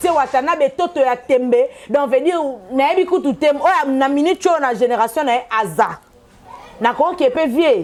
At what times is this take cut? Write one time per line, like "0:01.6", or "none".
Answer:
none